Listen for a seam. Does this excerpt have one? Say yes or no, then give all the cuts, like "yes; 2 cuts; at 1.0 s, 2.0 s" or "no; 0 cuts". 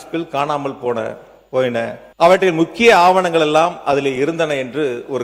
yes; 1 cut; at 2.0 s